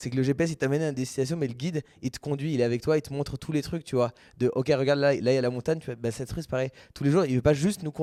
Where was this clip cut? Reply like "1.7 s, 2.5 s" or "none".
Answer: none